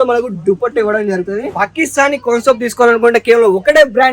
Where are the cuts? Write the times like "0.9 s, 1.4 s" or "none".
1.5 s